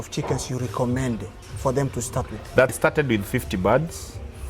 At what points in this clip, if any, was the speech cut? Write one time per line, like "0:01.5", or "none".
0:02.8